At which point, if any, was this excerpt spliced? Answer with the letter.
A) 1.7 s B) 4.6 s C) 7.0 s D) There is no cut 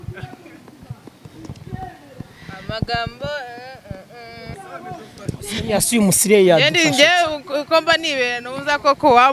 D